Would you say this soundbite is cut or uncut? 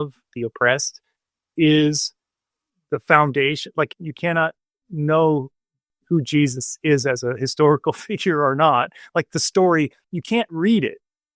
cut